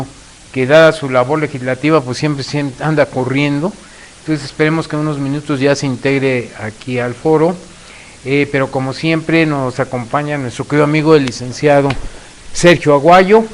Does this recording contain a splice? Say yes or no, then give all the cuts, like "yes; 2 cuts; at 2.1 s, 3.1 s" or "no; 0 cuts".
no; 0 cuts